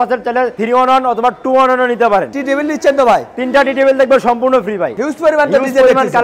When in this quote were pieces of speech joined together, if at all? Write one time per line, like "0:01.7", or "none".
0:02.3
0:04.9